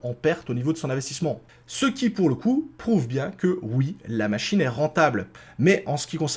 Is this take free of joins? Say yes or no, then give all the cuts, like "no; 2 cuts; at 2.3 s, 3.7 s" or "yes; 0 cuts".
no; 2 cuts; at 1.5 s, 5.4 s